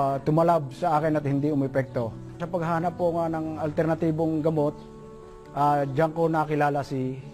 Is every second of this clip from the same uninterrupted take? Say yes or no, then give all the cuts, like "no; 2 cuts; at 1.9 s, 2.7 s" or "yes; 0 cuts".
yes; 0 cuts